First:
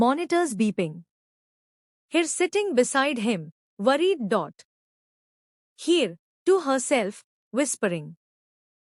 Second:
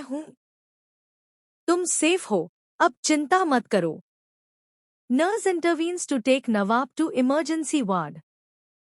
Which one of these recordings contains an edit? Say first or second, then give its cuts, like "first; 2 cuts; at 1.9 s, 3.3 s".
second; 1 cut; at 3.7 s